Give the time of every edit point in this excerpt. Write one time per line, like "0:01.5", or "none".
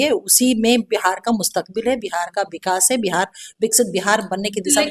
none